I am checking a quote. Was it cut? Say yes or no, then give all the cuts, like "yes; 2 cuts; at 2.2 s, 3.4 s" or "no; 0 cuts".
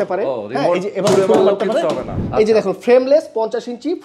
yes; 1 cut; at 2.2 s